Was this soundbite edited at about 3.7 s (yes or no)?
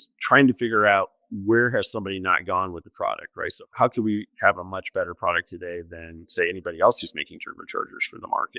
yes